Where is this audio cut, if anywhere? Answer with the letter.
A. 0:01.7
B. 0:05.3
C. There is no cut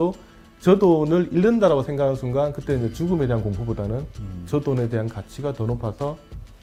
C